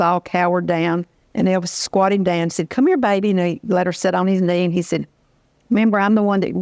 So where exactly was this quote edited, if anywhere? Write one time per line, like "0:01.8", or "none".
0:01.2